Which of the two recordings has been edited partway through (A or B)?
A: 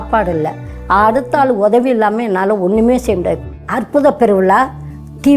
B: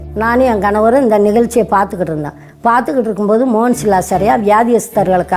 A